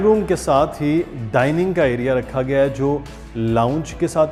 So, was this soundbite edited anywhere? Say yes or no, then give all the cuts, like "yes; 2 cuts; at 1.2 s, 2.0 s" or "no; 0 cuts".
no; 0 cuts